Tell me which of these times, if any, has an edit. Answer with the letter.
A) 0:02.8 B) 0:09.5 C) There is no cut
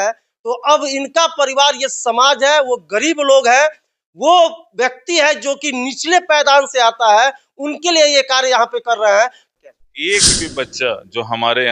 B